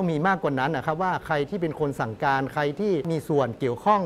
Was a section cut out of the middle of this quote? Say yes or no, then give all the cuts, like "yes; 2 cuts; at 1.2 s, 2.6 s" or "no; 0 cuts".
yes; 1 cut; at 3.1 s